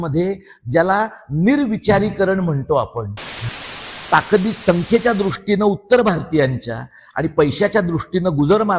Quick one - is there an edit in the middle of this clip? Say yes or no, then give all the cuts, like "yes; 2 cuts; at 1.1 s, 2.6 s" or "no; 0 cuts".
yes; 1 cut; at 3.6 s